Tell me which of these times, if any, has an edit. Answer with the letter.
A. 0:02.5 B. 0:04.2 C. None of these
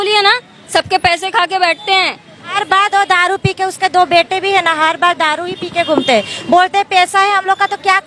A